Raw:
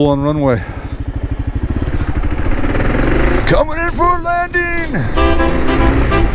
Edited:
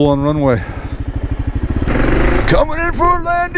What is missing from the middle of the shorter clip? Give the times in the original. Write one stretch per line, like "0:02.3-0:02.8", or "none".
0:01.9-0:02.9